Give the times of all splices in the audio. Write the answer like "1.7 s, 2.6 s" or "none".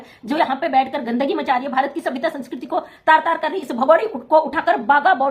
none